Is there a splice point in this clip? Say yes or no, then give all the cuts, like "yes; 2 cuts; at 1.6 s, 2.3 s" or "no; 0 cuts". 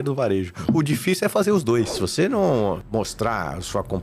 yes; 2 cuts; at 2.0 s, 2.8 s